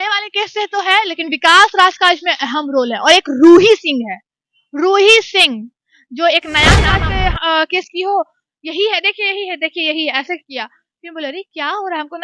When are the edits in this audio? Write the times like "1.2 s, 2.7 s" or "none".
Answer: 6.9 s